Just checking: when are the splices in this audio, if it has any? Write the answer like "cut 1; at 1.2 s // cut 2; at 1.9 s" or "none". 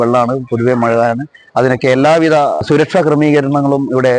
cut 1; at 2.6 s